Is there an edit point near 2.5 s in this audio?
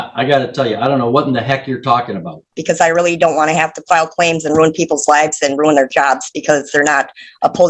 yes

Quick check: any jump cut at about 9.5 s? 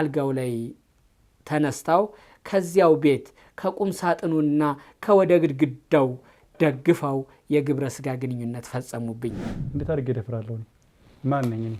yes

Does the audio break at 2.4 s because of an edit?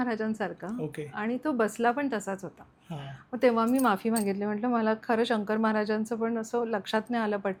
no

